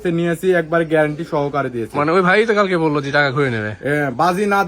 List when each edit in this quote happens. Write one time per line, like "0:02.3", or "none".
none